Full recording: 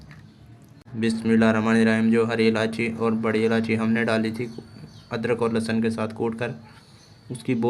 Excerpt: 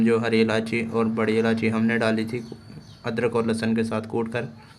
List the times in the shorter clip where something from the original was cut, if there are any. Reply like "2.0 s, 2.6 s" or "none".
none